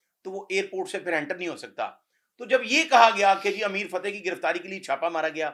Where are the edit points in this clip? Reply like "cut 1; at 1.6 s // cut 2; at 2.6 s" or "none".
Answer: none